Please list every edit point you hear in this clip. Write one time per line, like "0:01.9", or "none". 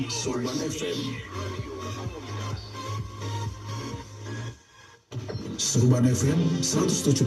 0:05.7